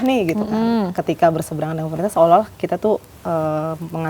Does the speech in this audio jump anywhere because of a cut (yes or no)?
no